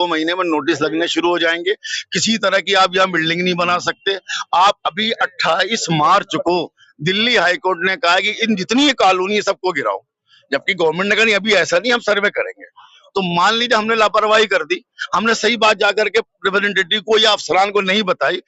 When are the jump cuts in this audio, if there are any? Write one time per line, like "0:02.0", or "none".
none